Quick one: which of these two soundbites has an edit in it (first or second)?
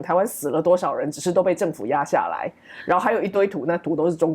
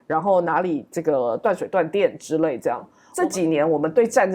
second